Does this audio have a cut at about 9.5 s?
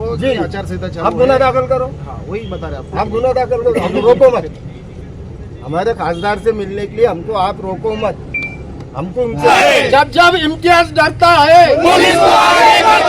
yes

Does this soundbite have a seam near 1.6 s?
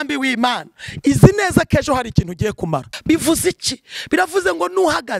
no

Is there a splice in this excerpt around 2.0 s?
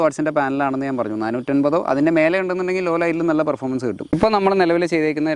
no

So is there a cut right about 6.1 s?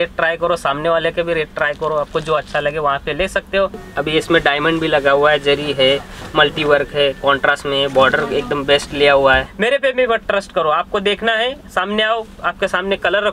no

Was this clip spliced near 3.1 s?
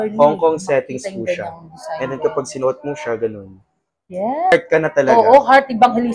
no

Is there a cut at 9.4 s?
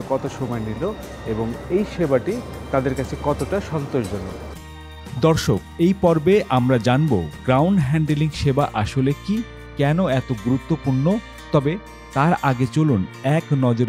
no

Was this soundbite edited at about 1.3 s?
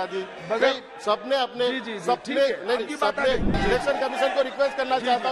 no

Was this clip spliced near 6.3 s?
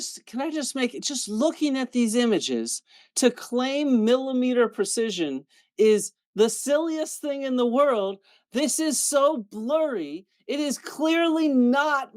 no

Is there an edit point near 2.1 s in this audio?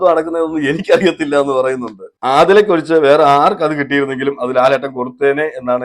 yes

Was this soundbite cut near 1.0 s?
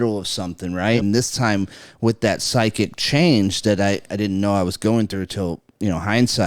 yes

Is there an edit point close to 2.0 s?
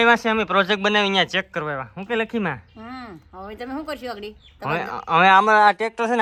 no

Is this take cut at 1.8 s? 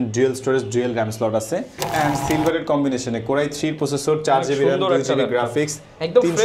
yes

